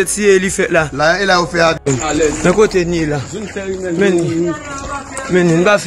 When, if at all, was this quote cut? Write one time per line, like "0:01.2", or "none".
0:01.8